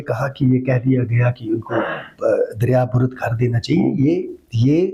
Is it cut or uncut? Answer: uncut